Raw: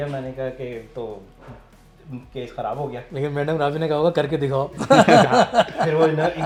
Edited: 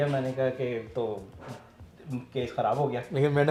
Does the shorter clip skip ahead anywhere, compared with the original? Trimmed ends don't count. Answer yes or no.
no